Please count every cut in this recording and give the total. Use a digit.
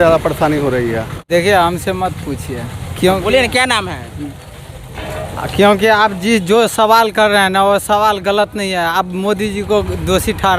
1